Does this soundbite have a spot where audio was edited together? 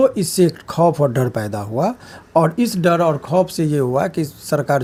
no; 0 cuts

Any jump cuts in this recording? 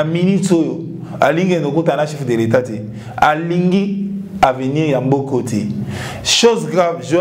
no; 0 cuts

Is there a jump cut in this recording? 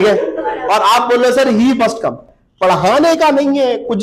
yes; 1 cut; at 2.3 s

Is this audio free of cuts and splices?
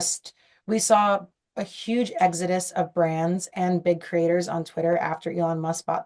yes; 0 cuts

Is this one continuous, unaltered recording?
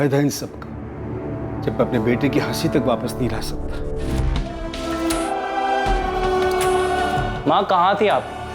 no; 1 cut; at 4.1 s

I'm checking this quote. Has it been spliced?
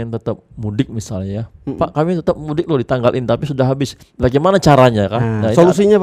no; 0 cuts

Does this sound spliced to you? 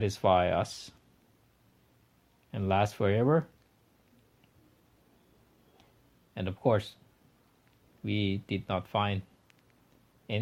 no; 0 cuts

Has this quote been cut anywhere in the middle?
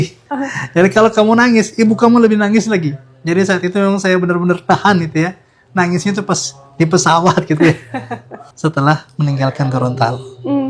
no; 0 cuts

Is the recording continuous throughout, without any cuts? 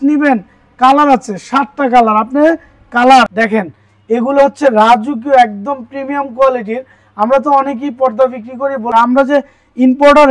no; 2 cuts; at 3.3 s, 8.9 s

